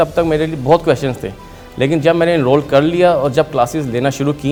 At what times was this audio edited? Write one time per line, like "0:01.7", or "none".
none